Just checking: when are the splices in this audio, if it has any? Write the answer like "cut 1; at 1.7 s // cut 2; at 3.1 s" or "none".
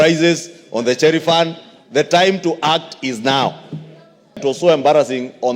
cut 1; at 4.4 s